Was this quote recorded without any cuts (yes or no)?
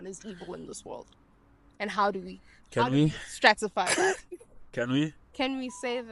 yes